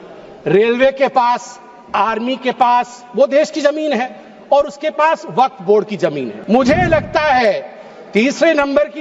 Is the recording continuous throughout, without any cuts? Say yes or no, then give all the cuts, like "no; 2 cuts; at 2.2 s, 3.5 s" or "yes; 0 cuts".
no; 1 cut; at 6.3 s